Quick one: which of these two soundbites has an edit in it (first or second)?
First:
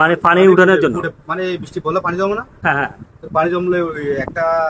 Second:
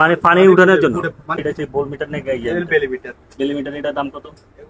second